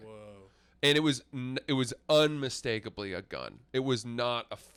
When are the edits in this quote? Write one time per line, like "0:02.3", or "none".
none